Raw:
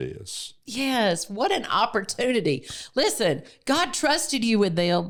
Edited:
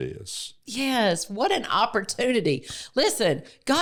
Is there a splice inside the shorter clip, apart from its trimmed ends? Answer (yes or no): no